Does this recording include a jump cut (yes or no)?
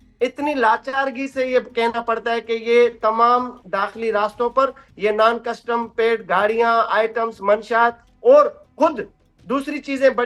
no